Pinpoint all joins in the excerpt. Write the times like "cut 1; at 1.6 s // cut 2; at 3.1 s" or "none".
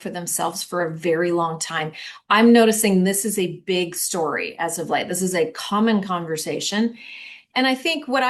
none

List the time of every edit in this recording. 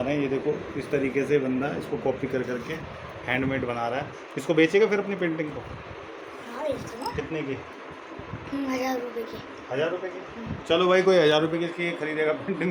none

